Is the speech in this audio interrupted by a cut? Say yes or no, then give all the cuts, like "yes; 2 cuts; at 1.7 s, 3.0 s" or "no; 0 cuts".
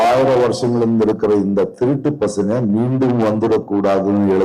no; 0 cuts